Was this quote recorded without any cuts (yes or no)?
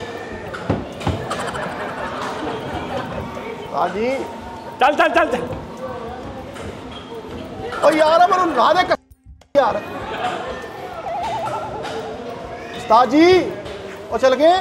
yes